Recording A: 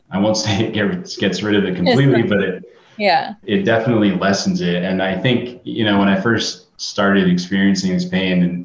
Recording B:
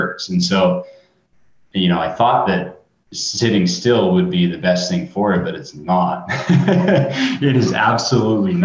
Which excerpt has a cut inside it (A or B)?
A